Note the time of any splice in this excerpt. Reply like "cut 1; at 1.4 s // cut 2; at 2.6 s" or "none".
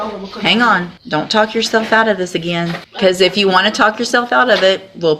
cut 1; at 0.9 s // cut 2; at 2.8 s